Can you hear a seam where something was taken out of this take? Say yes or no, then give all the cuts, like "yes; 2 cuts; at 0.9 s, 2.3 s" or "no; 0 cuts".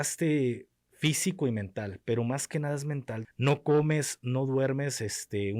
yes; 1 cut; at 3.1 s